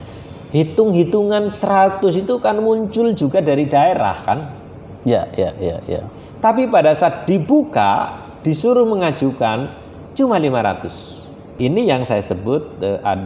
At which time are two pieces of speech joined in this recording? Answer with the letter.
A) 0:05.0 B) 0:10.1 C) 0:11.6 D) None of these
C